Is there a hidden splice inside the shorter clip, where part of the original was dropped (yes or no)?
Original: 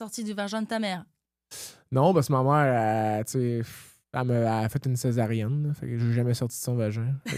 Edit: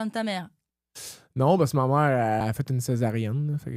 yes